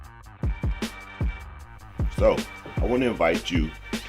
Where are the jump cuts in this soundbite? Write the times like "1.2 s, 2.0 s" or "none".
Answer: 1.2 s